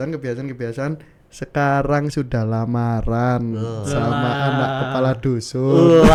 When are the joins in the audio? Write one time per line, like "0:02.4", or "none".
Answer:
none